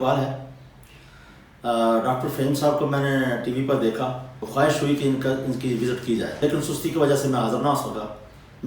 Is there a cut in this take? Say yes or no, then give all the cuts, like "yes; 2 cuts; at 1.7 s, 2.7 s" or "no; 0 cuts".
yes; 2 cuts; at 4.5 s, 6.3 s